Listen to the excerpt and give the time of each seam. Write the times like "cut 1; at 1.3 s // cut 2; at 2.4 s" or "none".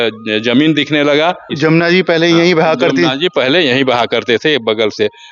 cut 1; at 1.5 s

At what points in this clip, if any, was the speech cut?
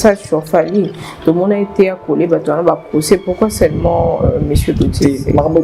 none

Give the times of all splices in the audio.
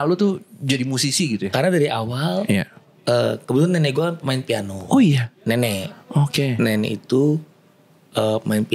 none

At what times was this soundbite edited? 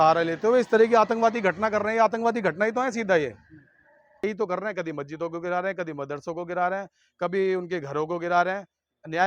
cut 1; at 4.2 s

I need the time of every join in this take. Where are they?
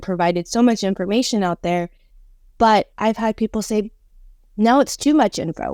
none

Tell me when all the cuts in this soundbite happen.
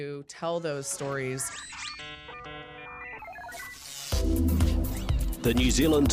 cut 1; at 1.7 s

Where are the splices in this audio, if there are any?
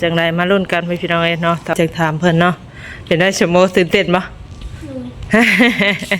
cut 1; at 1.7 s

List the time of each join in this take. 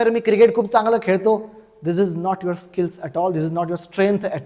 none

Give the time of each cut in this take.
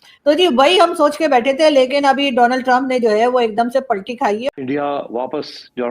cut 1; at 4.4 s

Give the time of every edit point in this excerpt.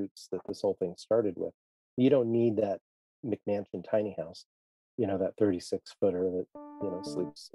none

